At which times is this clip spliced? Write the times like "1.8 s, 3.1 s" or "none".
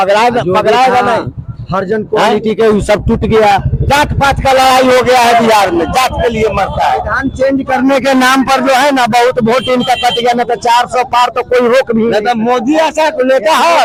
none